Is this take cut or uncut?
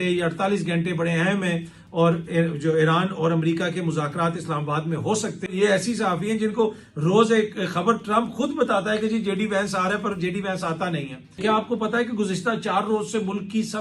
cut